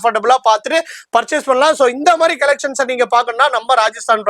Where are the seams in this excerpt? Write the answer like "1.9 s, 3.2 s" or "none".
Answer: none